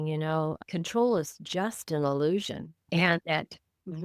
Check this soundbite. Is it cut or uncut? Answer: cut